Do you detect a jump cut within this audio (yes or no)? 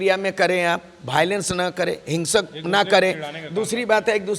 no